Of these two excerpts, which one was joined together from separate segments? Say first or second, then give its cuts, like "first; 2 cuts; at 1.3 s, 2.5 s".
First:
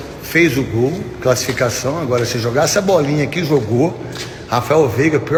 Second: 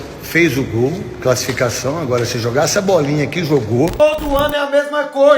second; 1 cut; at 3.9 s